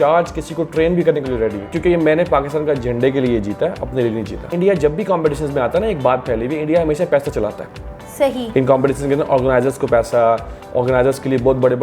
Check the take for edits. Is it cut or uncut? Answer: cut